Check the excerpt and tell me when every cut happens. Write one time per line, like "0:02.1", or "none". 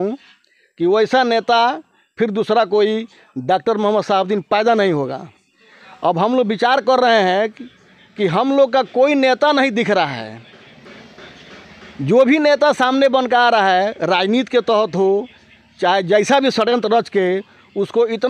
none